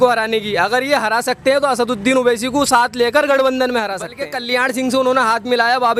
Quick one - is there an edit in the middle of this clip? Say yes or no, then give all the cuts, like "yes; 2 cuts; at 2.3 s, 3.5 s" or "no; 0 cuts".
yes; 1 cut; at 4.2 s